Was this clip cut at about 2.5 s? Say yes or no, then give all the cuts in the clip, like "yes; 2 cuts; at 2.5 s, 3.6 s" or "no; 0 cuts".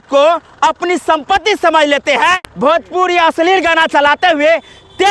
yes; 1 cut; at 2.5 s